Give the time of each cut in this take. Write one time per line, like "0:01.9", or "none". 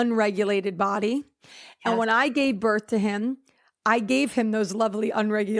none